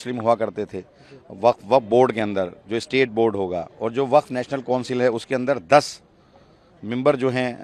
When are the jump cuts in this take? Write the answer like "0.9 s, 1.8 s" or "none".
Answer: none